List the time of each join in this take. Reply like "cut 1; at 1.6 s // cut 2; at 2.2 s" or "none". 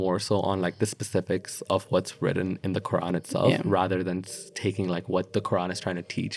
none